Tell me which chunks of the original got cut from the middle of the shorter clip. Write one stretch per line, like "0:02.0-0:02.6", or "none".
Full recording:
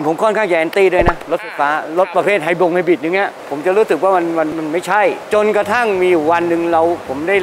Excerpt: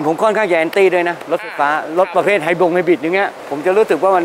none

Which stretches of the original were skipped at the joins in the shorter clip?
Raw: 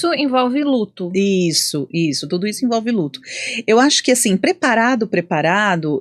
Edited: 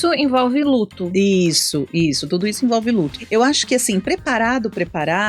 0:03.2-0:03.5

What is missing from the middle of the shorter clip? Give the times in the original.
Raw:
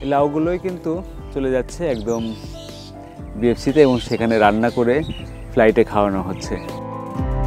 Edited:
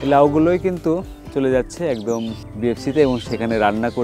0:02.4-0:03.2

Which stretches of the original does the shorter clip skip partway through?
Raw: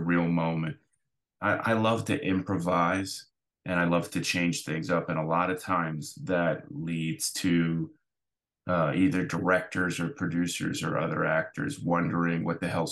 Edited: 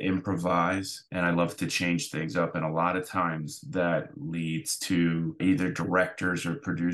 0:03.2-0:03.5
0:07.9-0:08.9

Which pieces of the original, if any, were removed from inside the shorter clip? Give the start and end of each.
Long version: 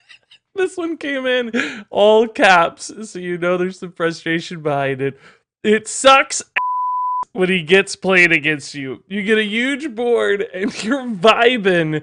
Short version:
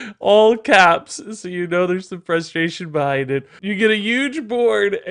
0:05.3-0:09.0

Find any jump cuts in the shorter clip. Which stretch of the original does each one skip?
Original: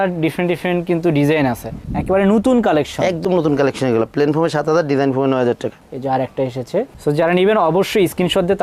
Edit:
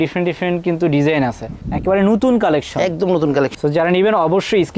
0:03.8-0:07.0

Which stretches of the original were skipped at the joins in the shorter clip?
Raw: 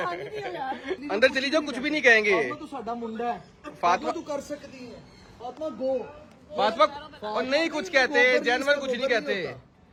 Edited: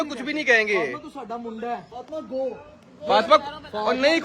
0:03.5-0:05.4

